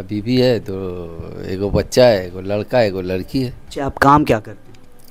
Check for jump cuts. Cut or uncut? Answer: cut